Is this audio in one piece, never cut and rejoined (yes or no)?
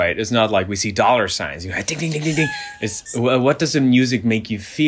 no